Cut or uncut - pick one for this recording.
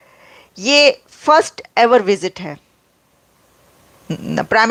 uncut